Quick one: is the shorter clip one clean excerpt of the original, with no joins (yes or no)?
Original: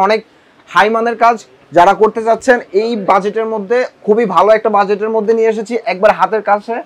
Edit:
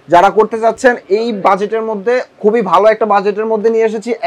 yes